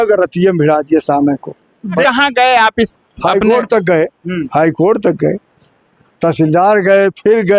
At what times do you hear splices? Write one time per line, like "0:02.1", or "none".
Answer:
0:02.0